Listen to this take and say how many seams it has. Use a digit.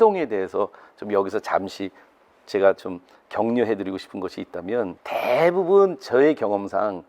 1